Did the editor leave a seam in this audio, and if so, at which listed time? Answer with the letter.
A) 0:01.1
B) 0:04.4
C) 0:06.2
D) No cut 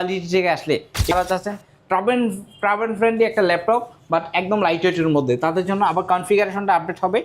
A